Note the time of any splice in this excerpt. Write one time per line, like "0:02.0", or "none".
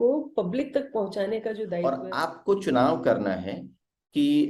0:01.7